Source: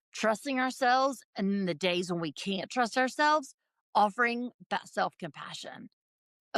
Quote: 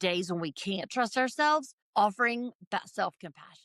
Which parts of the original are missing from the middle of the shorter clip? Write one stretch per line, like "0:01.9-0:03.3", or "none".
0:03.6-0:03.8